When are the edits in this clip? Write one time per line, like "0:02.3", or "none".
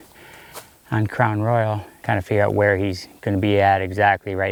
none